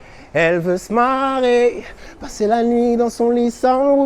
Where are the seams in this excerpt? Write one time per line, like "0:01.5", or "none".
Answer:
0:02.0